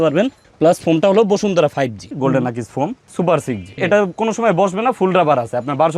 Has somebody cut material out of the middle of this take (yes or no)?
yes